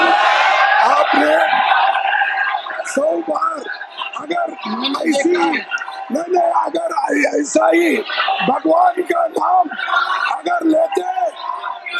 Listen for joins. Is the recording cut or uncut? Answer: uncut